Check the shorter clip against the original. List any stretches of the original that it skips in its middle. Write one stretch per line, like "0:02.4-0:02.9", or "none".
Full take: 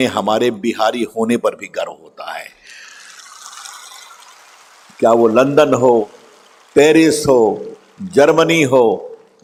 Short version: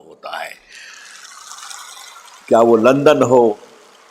0:04.4-0:04.9